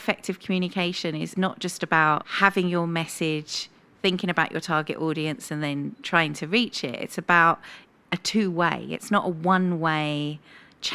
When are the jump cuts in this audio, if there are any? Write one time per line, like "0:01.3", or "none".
0:01.3
0:02.3